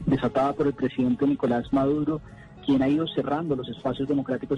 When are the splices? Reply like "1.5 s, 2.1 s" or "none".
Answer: 3.5 s